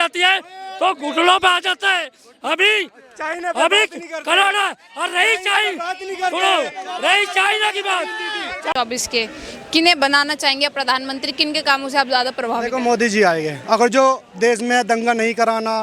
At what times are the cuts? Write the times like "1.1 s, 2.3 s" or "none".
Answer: 8.7 s